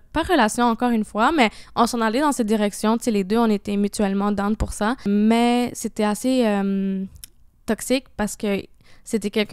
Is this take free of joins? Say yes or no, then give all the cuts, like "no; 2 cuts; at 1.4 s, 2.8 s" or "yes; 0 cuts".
no; 1 cut; at 5.1 s